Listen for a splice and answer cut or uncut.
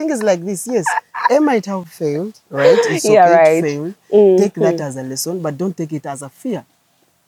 uncut